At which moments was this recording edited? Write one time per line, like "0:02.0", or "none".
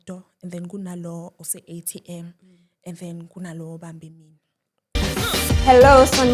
0:05.0